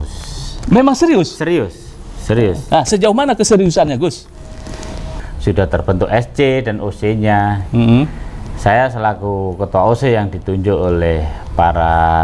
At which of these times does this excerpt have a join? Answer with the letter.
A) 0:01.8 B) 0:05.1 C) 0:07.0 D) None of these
B